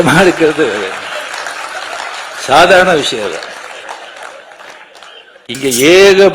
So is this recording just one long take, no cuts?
no; 1 cut; at 5.3 s

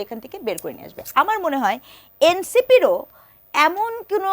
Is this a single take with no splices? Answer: yes; 0 cuts

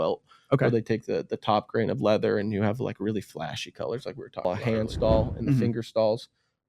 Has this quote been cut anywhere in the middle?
yes; 1 cut; at 4.4 s

